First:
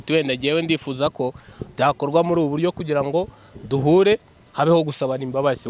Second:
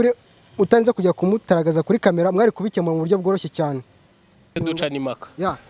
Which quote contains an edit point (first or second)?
second